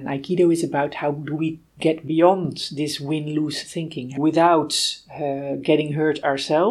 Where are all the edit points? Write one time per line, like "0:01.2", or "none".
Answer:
0:04.1